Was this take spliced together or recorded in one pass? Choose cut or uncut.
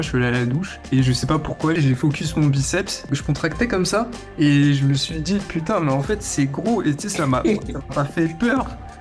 cut